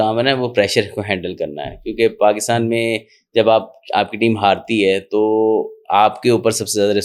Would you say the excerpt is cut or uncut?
uncut